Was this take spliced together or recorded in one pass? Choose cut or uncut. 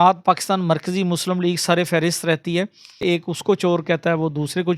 cut